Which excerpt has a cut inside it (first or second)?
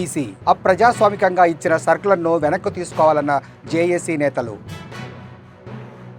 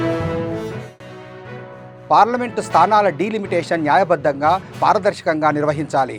second